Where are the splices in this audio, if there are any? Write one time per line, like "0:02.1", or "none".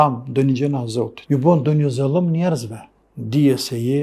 0:01.2